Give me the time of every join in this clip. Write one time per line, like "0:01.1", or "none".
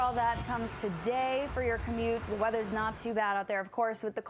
0:02.5